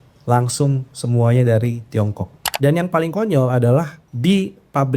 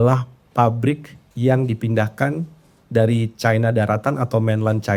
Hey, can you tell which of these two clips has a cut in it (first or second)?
first